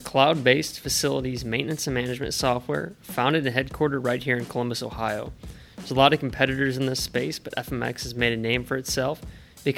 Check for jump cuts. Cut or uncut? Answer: uncut